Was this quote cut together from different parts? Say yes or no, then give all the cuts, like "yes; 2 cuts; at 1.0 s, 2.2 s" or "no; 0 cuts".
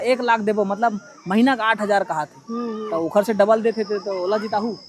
no; 0 cuts